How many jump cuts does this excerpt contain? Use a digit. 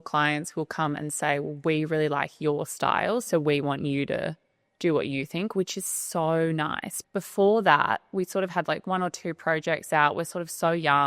1